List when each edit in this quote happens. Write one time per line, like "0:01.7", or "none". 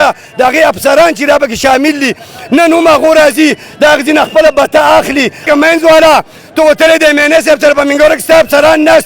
0:05.4